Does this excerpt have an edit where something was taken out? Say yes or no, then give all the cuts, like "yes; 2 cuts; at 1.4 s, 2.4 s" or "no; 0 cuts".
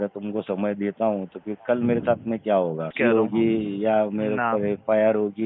yes; 1 cut; at 2.9 s